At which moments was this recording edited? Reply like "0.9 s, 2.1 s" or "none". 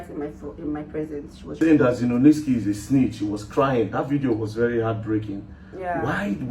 1.5 s